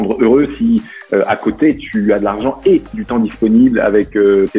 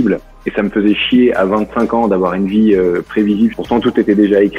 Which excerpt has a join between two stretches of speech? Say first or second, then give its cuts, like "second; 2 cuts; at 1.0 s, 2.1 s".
second; 1 cut; at 3.6 s